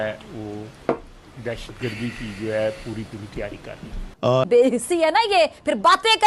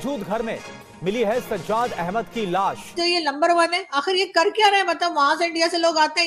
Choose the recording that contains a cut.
first; 1 cut; at 4.4 s

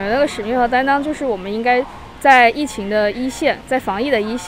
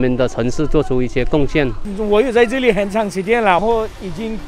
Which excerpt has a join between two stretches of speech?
second; 1 cut; at 1.8 s

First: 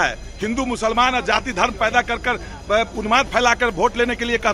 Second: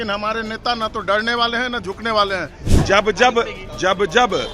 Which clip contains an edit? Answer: second; 1 cut; at 2.7 s

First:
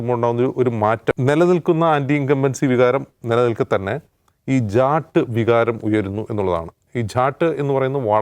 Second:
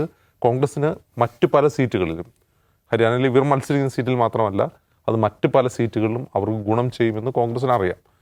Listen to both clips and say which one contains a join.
first; 1 cut; at 1.1 s

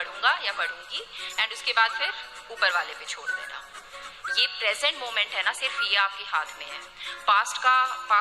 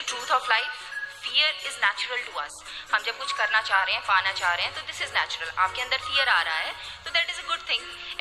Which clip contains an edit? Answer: first; 1 cut; at 3.9 s

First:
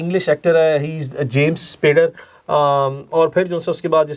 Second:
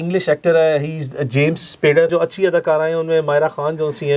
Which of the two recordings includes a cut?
second; 1 cut; at 2.1 s

